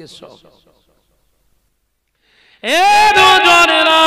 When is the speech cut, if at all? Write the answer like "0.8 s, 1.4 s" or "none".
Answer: 2.6 s

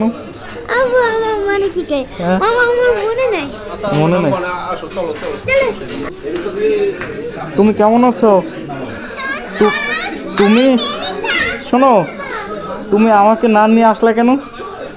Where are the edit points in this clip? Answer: none

